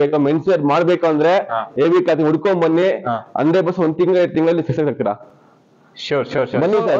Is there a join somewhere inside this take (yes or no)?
no